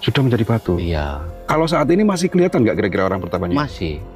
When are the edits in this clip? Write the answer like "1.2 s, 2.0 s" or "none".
1.2 s